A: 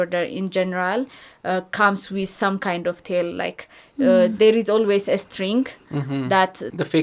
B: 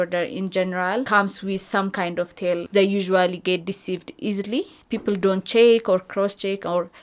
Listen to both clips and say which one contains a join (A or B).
B